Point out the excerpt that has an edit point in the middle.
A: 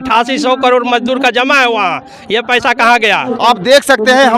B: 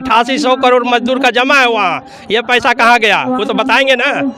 A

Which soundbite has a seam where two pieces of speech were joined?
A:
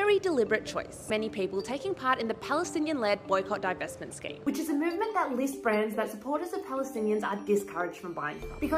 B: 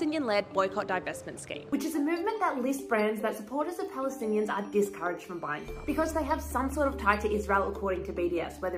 A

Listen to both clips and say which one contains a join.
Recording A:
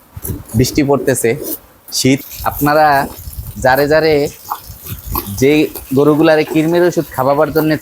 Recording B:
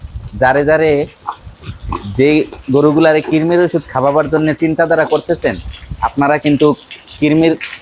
A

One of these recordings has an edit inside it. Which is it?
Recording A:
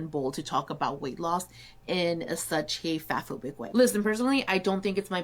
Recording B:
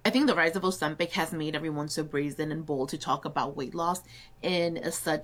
A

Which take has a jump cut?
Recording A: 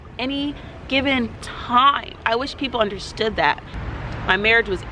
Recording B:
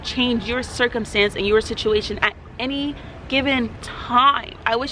A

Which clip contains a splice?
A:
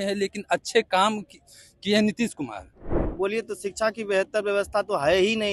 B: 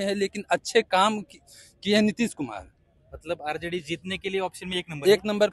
A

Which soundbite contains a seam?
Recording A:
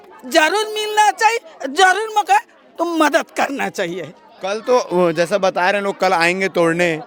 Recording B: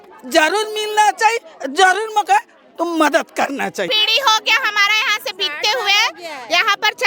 B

